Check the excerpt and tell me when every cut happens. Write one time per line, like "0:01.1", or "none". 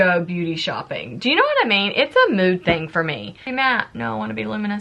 0:03.5